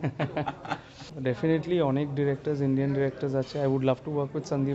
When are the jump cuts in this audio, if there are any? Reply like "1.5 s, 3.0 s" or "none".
1.1 s